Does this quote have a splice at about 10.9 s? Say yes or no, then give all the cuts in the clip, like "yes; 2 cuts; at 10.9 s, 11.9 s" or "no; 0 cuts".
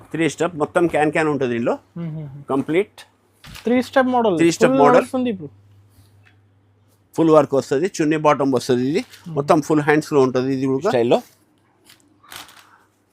yes; 1 cut; at 10.9 s